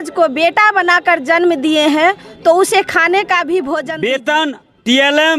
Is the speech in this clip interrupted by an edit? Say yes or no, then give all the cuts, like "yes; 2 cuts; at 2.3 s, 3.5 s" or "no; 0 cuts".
yes; 1 cut; at 3.9 s